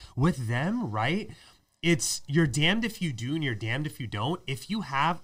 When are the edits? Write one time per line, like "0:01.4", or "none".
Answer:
none

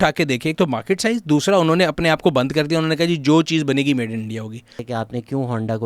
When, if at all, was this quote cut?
0:04.8

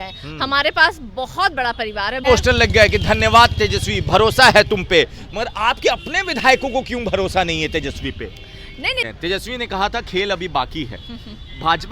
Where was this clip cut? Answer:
0:02.2
0:09.1

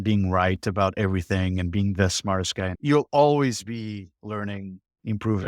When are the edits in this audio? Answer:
0:02.8

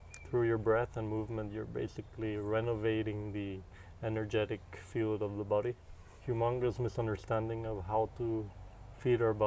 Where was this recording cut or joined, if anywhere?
0:06.1

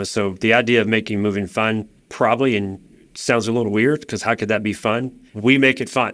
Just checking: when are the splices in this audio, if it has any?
0:05.2

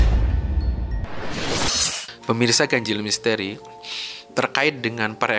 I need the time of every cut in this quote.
none

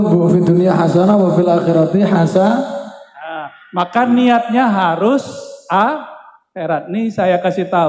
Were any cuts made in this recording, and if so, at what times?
none

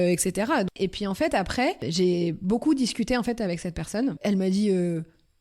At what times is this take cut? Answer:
0:00.7
0:01.9
0:04.2

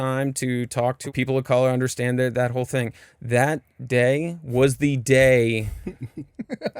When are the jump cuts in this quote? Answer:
0:01.1

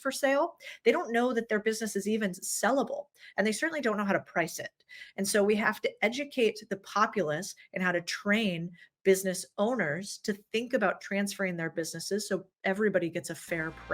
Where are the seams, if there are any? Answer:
none

